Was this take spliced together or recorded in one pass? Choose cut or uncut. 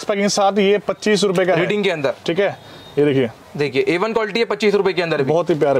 uncut